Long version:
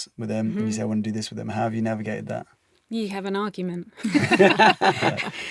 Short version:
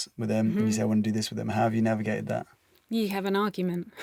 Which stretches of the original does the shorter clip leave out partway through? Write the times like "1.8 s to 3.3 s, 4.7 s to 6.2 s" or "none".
none